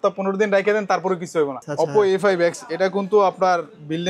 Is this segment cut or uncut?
cut